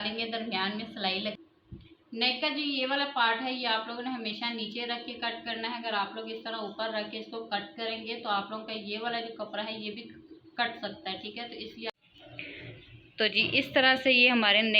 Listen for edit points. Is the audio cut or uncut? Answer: cut